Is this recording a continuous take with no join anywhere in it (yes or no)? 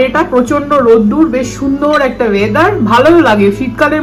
yes